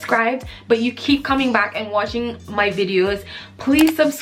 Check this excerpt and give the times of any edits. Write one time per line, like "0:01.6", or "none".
none